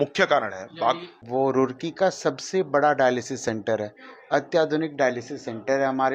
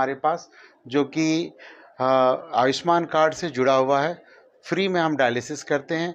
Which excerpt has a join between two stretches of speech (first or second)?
first